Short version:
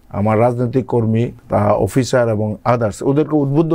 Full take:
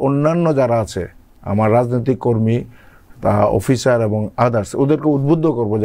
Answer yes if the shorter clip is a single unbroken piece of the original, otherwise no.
no